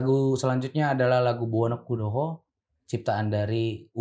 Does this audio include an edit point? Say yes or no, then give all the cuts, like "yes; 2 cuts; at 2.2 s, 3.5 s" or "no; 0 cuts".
no; 0 cuts